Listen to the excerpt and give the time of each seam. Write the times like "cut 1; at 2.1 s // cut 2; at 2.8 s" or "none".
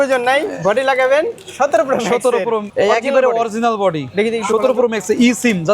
cut 1; at 1.4 s // cut 2; at 2.7 s